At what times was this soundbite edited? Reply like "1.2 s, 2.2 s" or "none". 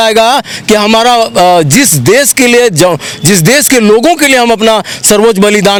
none